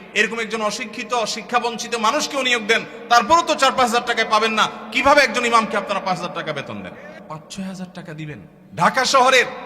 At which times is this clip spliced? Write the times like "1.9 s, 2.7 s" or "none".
7.2 s, 8.6 s